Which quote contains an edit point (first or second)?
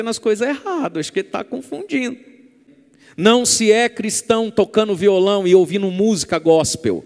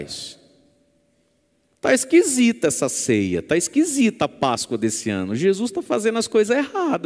first